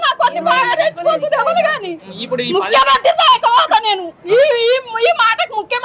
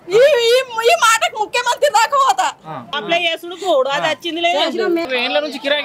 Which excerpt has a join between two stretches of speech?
second; 2 cuts; at 2.9 s, 5.1 s

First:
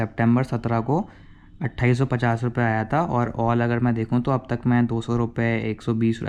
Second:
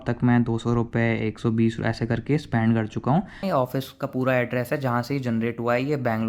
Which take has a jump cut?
second; 1 cut; at 3.4 s

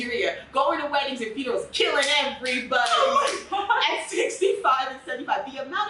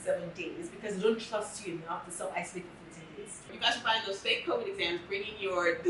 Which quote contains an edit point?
second; 1 cut; at 3.6 s

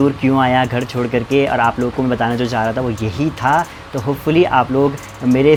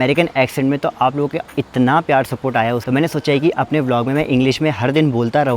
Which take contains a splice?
second; 1 cut; at 2.8 s

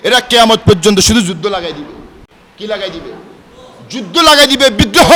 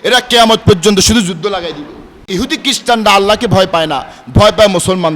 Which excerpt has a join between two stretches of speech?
second; 1 cut; at 2.3 s

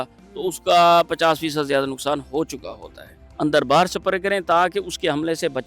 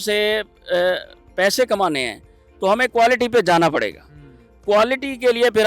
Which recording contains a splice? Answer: first; 1 cut; at 3.2 s

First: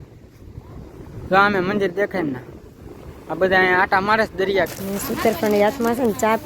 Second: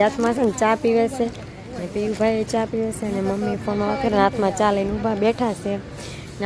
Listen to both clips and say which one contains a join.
first; 1 cut; at 4.7 s

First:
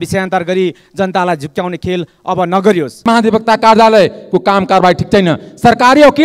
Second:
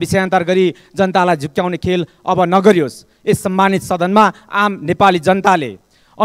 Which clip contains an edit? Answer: first; 1 cut; at 3.0 s

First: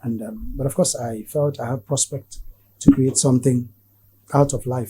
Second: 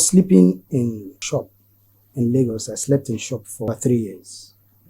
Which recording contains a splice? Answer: second; 2 cuts; at 1.2 s, 3.7 s

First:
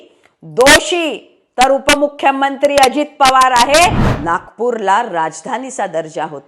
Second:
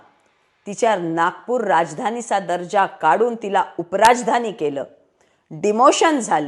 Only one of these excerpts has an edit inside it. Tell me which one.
first; 1 cut; at 4.1 s

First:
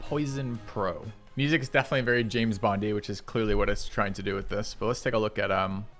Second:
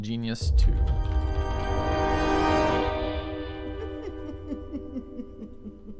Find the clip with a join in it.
first; 1 cut; at 1.2 s

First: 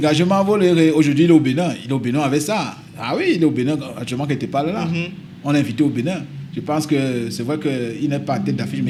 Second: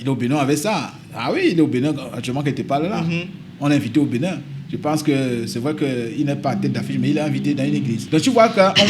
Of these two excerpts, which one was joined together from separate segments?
second; 1 cut; at 8.0 s

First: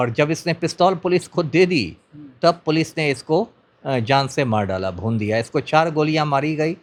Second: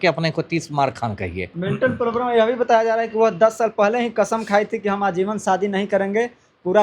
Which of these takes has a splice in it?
second; 1 cut; at 1.5 s

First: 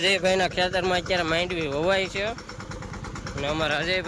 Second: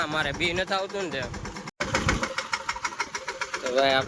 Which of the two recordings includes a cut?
second; 1 cut; at 1.7 s

